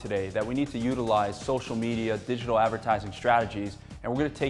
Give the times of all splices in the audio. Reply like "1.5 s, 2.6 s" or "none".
none